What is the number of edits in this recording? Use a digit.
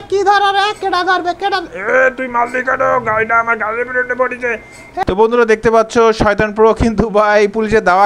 1